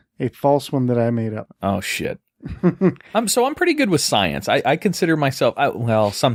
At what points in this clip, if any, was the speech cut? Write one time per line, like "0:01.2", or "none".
none